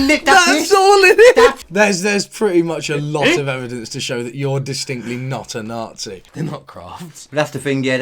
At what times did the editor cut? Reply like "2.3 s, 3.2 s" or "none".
1.6 s, 6.2 s